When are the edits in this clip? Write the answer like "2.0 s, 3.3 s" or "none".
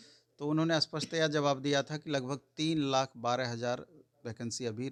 none